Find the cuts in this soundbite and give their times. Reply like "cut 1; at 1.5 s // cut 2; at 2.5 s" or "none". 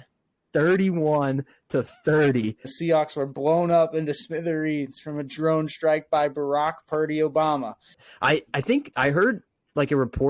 cut 1; at 2.7 s // cut 2; at 8.0 s